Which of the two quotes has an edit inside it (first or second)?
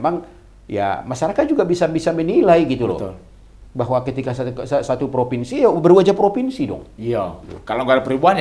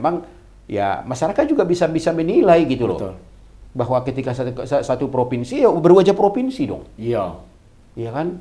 first